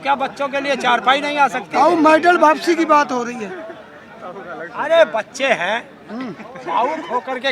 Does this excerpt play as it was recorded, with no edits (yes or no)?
yes